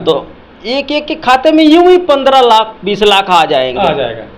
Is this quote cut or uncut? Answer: uncut